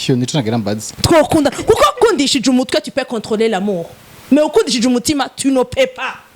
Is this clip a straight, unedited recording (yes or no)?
no